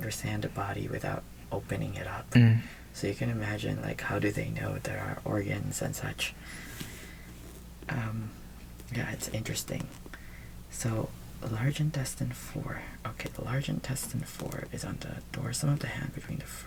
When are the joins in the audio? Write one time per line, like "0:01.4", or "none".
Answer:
none

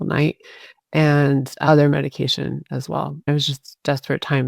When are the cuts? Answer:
0:03.3

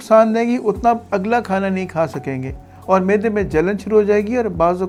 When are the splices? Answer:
none

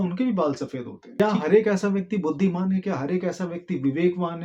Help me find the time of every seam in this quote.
0:01.2

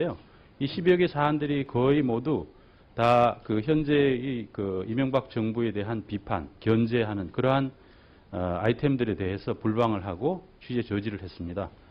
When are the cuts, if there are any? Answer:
0:04.8

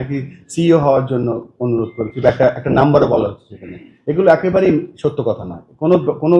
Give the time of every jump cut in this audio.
none

